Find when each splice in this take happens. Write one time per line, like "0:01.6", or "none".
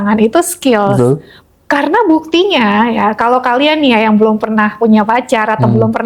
none

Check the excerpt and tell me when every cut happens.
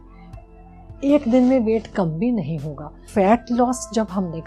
0:03.0

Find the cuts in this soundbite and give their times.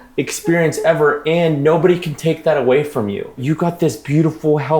0:03.4

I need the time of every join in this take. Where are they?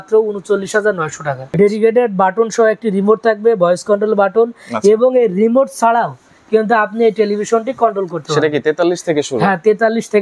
0:01.5

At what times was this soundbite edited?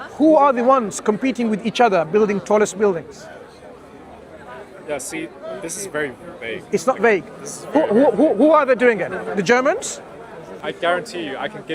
0:10.6

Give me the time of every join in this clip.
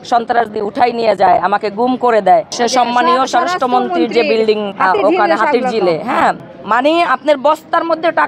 0:02.5
0:04.7
0:06.5

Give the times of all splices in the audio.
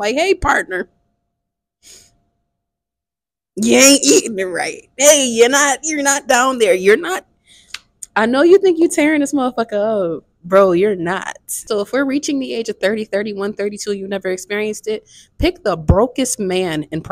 0:11.6

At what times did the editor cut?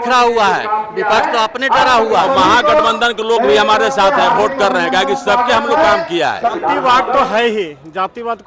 0:02.2
0:06.5

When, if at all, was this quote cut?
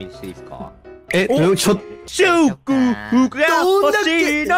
0:01.9

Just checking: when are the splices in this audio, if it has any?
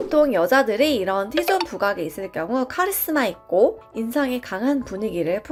none

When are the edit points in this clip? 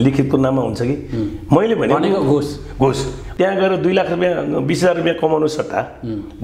0:03.2

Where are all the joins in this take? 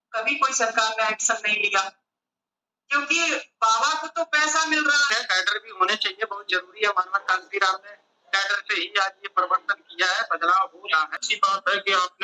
0:05.1
0:11.3

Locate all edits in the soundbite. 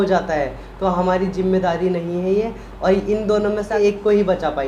0:03.7

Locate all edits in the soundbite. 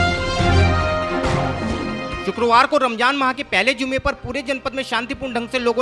0:01.8

